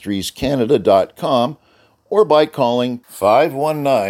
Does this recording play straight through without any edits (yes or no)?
yes